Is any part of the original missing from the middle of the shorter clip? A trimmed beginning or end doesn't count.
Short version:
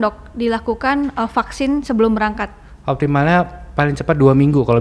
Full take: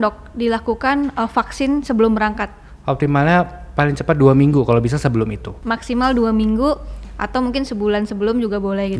no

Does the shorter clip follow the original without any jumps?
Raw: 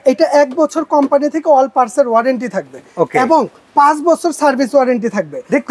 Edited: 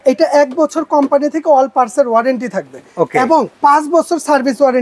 no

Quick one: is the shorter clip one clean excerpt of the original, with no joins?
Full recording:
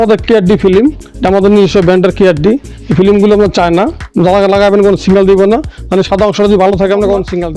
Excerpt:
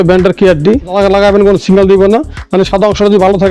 no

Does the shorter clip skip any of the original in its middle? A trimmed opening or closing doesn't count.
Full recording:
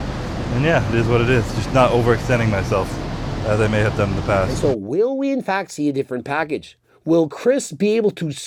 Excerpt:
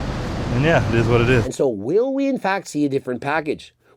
yes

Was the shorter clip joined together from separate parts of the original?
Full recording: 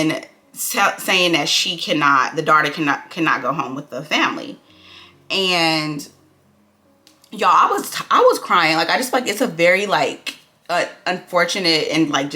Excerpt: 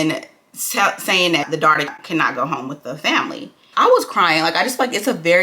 yes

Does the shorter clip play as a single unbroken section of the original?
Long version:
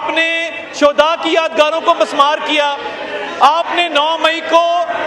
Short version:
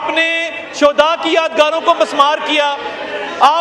yes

